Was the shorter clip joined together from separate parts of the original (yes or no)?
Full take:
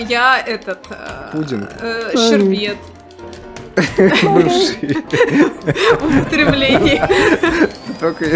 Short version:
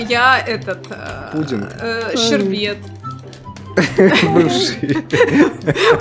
no